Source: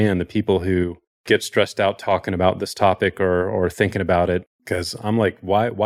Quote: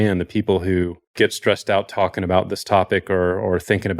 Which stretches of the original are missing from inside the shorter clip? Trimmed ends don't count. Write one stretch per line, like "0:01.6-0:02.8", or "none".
0:01.0-0:01.1